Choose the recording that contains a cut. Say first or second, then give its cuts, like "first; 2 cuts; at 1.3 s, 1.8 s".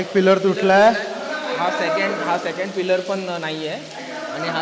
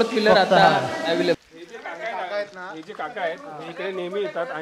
second; 1 cut; at 1.4 s